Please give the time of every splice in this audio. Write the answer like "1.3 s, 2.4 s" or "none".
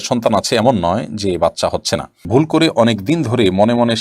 2.2 s